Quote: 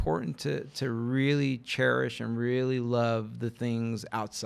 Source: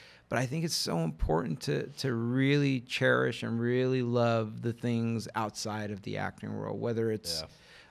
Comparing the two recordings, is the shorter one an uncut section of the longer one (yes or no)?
yes